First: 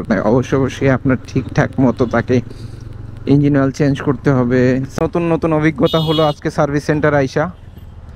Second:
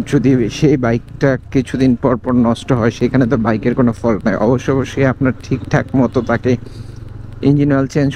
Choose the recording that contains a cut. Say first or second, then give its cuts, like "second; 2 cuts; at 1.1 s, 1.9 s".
first; 1 cut; at 4.9 s